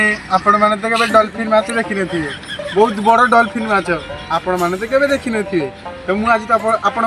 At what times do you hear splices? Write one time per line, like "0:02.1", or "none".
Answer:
none